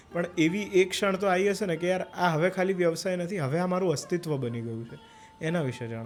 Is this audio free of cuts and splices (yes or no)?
yes